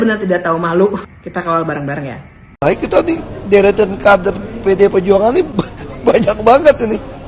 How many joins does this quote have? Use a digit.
1